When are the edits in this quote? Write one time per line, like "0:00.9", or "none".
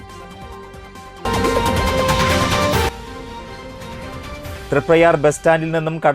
0:01.1